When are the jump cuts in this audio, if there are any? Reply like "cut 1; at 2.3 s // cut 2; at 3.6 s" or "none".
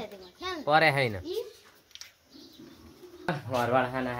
cut 1; at 3.3 s